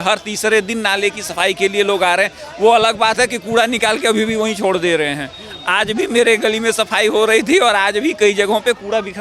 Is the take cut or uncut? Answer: uncut